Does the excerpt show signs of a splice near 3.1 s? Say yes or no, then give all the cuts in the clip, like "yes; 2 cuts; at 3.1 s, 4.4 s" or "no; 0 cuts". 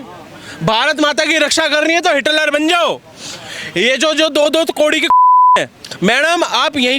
no; 0 cuts